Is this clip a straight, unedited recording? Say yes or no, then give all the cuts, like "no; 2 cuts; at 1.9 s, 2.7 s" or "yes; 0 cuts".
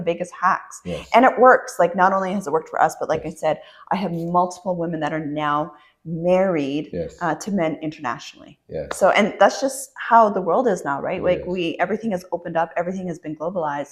yes; 0 cuts